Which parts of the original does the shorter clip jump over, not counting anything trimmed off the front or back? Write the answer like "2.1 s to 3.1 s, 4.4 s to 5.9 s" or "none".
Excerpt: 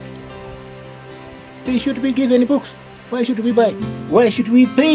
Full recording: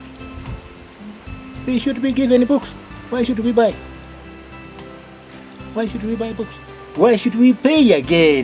3.9 s to 6.8 s